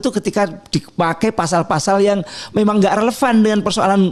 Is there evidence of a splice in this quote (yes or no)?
no